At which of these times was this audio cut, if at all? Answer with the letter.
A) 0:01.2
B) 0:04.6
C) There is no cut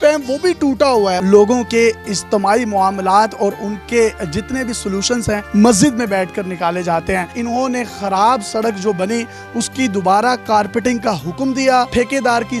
A